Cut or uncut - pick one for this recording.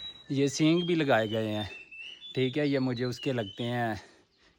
uncut